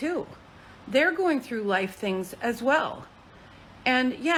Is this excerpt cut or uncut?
uncut